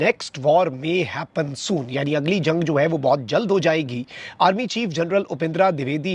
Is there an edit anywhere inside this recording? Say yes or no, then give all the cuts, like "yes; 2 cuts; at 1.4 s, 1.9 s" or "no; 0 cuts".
no; 0 cuts